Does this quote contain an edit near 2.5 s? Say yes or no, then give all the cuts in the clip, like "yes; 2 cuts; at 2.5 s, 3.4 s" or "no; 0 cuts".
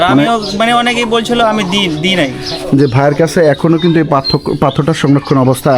yes; 1 cut; at 2.5 s